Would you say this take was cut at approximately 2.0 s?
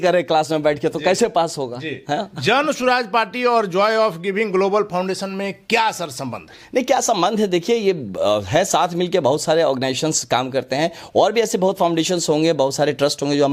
no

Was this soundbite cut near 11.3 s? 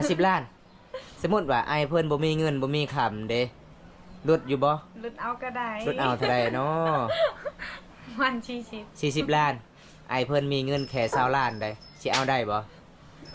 no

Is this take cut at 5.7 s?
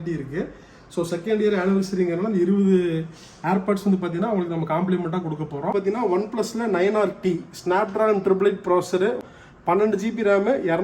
yes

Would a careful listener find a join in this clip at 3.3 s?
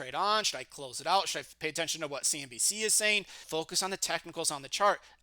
yes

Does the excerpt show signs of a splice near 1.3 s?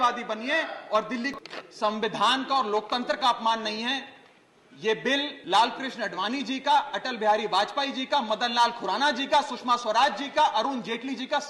yes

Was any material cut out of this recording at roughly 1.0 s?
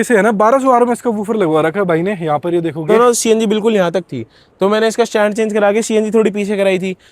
no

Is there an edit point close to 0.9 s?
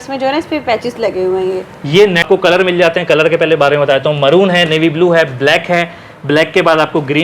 no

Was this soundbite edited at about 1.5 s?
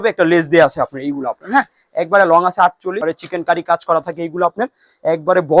no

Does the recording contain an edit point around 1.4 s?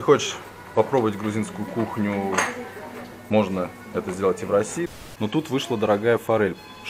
no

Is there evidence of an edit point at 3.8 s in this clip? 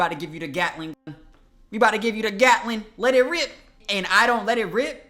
yes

